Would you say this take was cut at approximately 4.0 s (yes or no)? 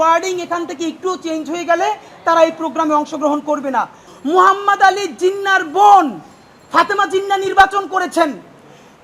yes